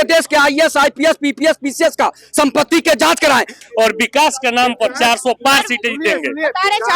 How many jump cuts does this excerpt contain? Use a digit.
1